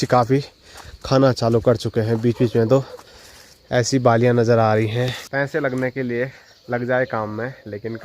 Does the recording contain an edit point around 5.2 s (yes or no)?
yes